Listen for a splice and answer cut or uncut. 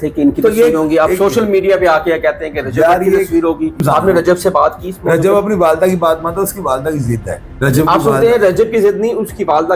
cut